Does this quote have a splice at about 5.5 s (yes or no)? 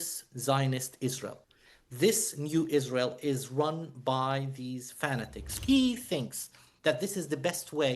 yes